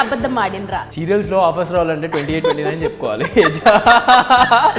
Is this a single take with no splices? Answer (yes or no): no